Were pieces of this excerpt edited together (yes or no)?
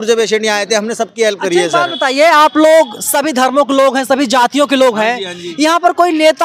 no